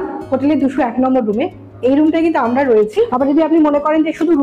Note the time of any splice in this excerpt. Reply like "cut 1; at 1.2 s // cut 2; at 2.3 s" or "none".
cut 1; at 3.1 s